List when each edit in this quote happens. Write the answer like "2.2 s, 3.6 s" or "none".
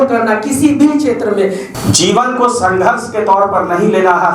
1.6 s